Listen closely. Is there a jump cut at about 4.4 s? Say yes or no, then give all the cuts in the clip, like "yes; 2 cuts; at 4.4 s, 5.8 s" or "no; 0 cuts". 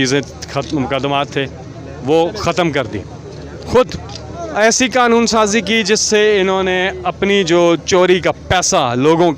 yes; 1 cut; at 4.4 s